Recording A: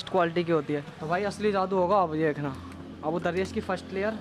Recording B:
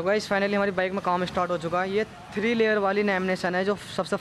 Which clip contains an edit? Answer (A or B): A